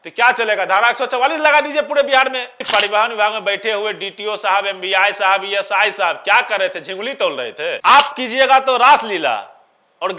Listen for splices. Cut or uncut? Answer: cut